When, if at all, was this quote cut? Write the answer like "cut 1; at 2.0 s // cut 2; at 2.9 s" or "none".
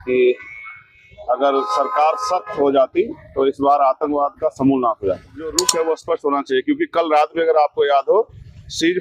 cut 1; at 5.6 s